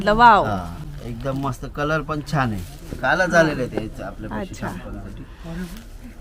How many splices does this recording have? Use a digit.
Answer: 0